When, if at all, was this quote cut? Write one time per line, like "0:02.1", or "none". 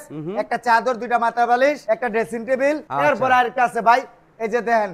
0:02.9